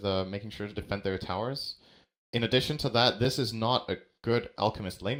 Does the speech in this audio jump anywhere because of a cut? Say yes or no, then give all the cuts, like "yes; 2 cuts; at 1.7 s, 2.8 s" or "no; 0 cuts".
no; 0 cuts